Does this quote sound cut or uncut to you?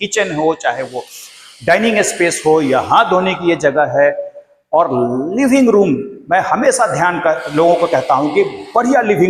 uncut